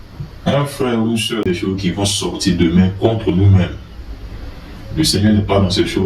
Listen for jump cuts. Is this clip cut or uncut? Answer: cut